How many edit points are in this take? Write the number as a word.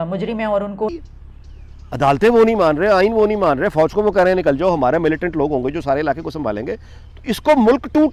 one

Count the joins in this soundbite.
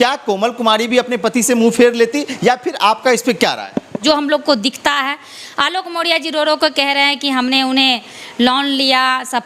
one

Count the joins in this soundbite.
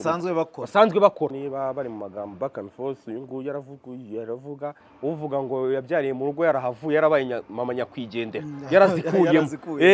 two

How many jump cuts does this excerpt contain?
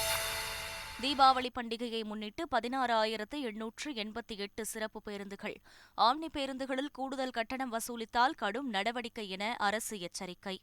zero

